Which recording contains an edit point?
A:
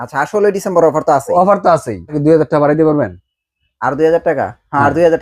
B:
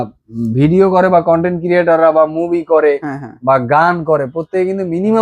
A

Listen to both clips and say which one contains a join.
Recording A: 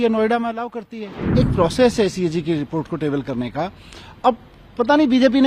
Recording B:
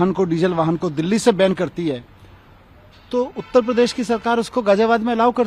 A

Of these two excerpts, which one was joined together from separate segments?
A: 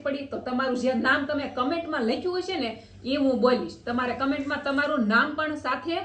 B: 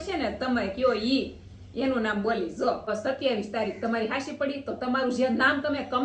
B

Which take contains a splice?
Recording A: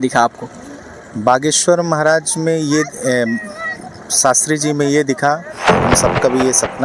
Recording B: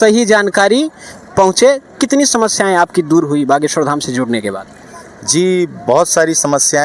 A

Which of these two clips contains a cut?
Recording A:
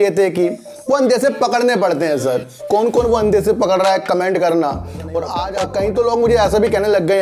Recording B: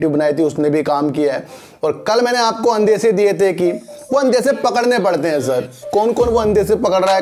A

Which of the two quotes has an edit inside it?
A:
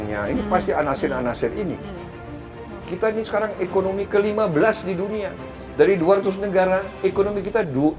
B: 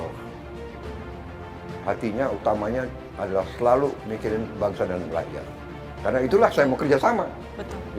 A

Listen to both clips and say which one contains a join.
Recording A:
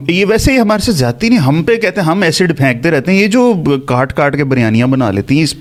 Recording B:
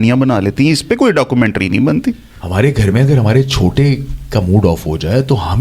B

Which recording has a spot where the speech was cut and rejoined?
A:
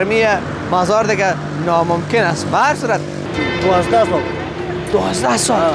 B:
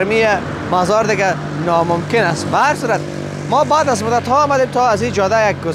A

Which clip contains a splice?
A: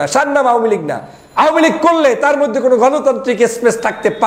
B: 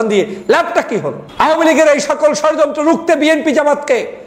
B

